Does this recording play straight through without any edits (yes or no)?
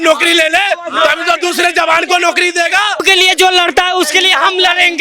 no